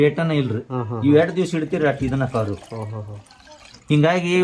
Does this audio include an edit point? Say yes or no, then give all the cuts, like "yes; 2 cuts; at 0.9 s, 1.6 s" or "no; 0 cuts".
no; 0 cuts